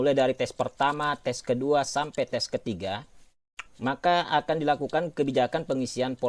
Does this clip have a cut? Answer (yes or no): no